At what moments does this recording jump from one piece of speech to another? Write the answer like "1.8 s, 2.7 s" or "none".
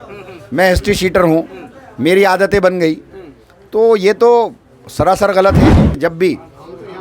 5.8 s